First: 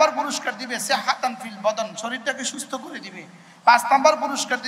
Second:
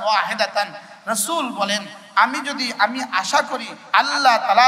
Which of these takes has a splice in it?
second; 1 cut; at 3.7 s

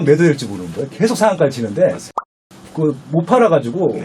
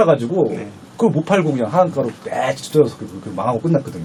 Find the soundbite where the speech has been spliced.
first; 1 cut; at 2.3 s

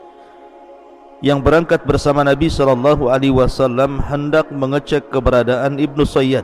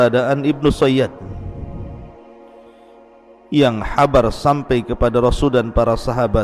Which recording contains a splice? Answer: first; 1 cut; at 1.2 s

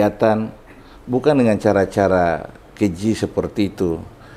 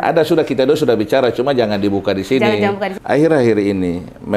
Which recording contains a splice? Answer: second; 1 cut; at 2.9 s

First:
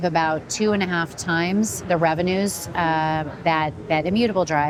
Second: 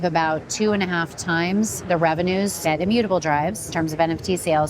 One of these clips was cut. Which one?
second; 2 cuts; at 2.6 s, 3.6 s

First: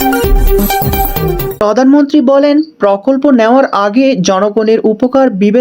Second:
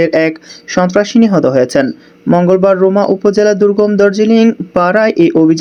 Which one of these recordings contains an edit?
first; 1 cut; at 1.6 s

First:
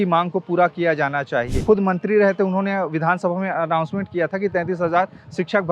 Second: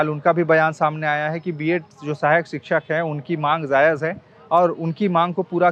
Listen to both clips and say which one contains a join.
first; 1 cut; at 1.6 s

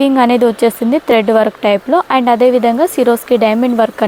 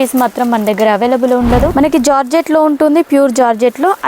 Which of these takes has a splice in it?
second; 1 cut; at 1.7 s

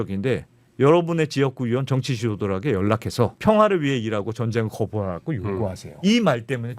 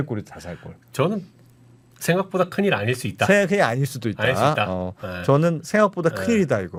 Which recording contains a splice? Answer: first; 2 cuts; at 3.4 s, 5.9 s

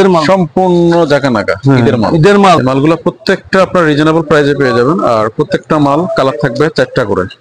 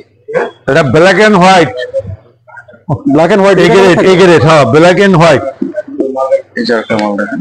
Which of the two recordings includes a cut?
first; 1 cut; at 2.6 s

